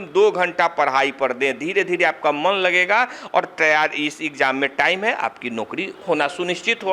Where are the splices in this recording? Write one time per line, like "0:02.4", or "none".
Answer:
0:05.9